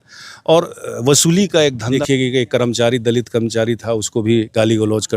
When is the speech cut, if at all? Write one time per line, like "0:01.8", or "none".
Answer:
0:02.0